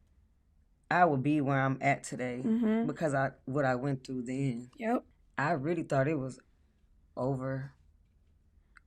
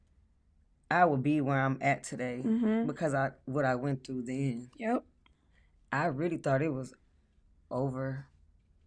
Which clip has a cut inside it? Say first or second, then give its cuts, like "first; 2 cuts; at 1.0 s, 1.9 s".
first; 1 cut; at 5.2 s